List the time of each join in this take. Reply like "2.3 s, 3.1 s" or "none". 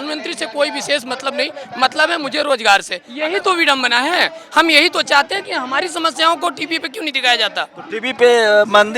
3.0 s